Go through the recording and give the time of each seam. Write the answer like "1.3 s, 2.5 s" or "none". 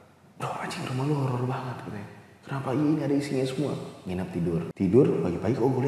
4.6 s